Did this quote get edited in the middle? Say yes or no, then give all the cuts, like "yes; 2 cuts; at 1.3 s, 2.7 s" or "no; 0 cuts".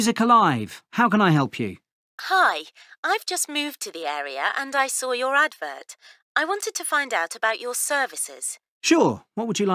no; 0 cuts